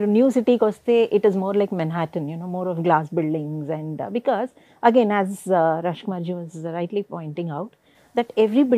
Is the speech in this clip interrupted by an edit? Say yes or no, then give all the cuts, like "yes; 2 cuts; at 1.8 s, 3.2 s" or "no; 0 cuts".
no; 0 cuts